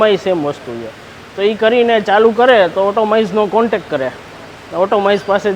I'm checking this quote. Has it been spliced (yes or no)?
no